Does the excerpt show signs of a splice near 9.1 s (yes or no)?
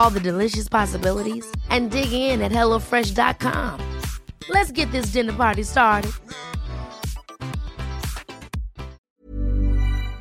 yes